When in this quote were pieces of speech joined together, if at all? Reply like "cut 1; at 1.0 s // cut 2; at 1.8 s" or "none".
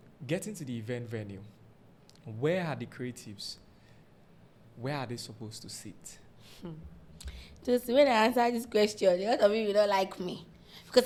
none